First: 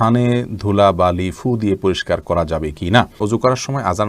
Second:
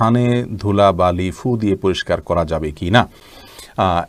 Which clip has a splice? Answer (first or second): first